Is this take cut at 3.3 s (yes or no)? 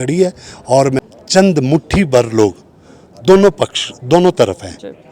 no